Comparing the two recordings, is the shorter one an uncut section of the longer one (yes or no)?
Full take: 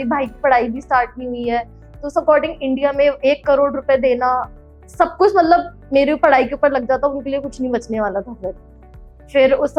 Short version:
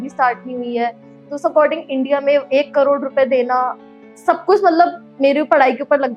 yes